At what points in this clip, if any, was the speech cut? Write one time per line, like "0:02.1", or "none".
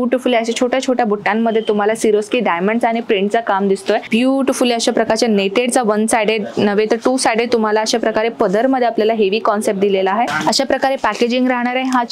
0:04.1
0:10.3